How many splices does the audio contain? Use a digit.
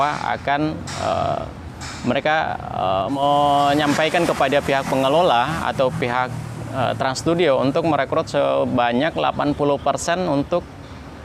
1